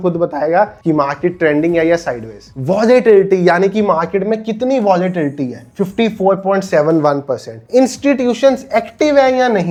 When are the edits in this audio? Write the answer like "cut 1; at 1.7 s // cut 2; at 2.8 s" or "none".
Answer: none